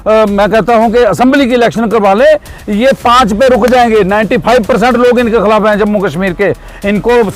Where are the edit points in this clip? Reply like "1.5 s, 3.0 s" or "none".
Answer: none